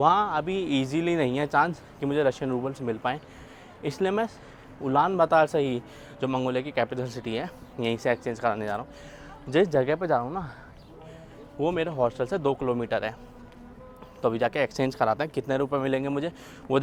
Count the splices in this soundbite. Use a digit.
0